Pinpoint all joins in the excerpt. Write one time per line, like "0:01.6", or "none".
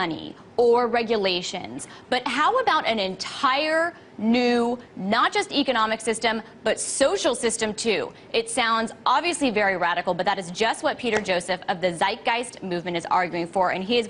0:06.8